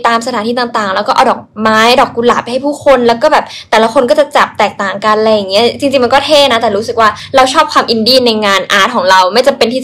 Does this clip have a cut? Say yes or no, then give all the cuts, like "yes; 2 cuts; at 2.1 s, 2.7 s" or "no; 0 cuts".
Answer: no; 0 cuts